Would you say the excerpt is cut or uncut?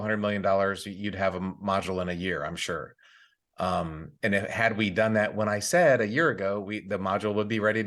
uncut